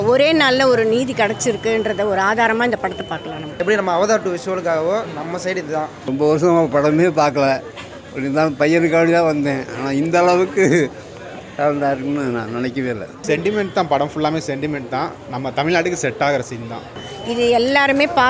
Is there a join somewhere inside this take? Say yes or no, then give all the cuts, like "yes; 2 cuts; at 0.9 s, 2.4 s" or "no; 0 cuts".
yes; 4 cuts; at 3.6 s, 6.0 s, 13.2 s, 17.0 s